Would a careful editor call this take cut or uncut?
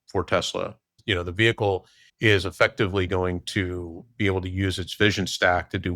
cut